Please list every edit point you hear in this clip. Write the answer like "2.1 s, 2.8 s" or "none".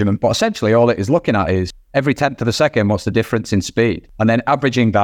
1.8 s, 4.1 s